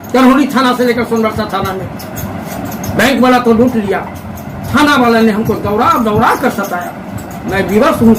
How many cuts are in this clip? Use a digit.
0